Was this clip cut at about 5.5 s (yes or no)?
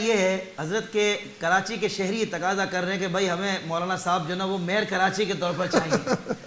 no